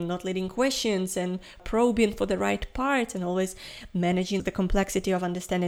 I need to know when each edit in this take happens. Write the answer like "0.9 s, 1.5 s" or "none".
1.6 s, 4.4 s